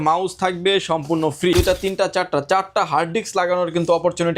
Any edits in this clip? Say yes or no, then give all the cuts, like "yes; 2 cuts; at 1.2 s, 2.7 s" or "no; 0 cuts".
yes; 1 cut; at 1.5 s